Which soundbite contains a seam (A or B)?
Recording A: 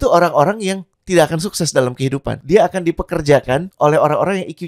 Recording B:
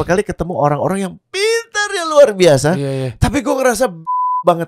A